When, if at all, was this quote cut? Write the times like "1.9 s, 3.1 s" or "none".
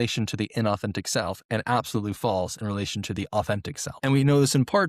3.8 s